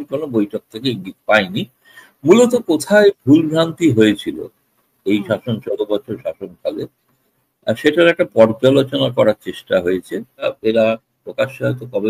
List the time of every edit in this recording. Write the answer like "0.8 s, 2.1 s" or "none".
10.5 s

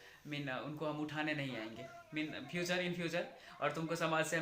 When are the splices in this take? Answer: none

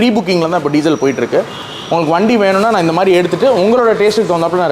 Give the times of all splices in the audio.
none

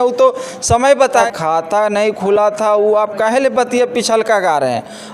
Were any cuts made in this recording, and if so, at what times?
1.3 s

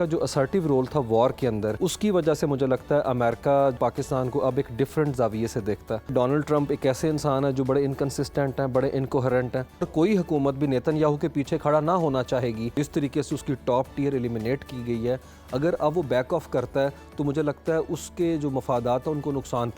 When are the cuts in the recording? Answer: 1.8 s, 3.8 s, 6.1 s, 9.9 s, 12.7 s

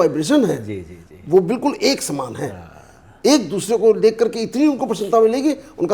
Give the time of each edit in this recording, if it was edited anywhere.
none

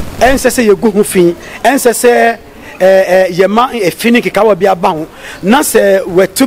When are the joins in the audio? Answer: none

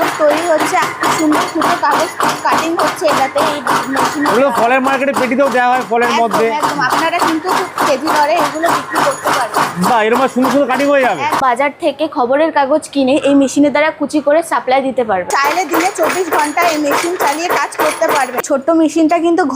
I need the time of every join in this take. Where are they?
0.8 s, 11.4 s, 15.3 s, 18.4 s

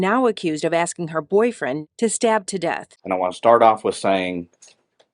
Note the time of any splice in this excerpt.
1.8 s, 2.9 s

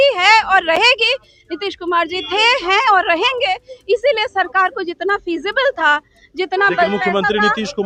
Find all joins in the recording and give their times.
none

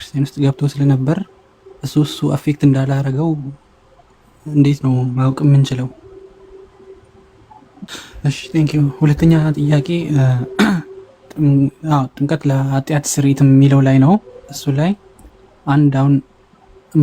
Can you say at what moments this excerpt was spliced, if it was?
7.9 s

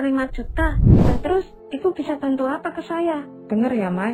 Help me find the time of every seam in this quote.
1.0 s

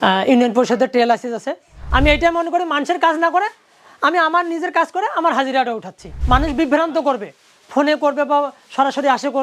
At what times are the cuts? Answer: 1.8 s, 6.1 s

